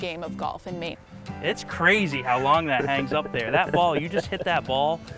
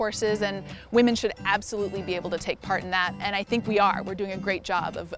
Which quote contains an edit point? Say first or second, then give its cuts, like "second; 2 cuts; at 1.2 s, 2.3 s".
first; 1 cut; at 0.9 s